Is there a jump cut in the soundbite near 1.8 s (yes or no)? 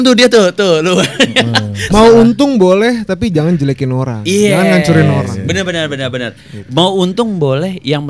yes